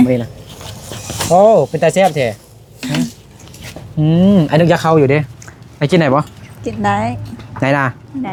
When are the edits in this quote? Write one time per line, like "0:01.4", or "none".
none